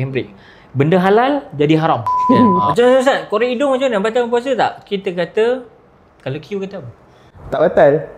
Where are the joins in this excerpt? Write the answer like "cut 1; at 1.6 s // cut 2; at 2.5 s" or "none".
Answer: cut 1; at 2.1 s